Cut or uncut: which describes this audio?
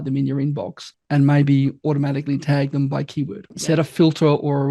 cut